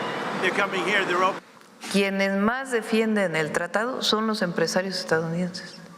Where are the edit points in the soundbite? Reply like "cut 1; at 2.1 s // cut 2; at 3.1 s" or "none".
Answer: cut 1; at 1.4 s